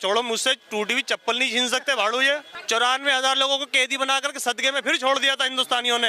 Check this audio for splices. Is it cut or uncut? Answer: cut